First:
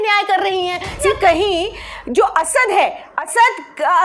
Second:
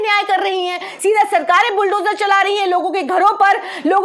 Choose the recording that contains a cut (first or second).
first